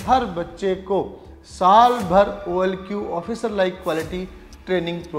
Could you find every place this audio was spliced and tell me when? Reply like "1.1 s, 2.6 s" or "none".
none